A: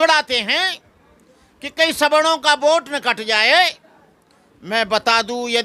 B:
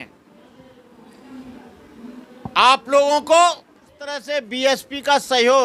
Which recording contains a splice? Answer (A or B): B